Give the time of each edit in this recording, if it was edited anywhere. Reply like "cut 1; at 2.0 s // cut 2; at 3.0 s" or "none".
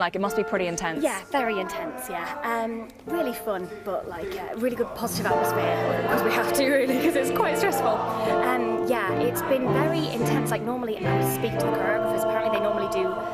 cut 1; at 6.4 s